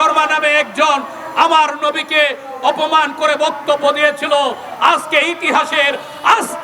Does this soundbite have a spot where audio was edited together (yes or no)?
no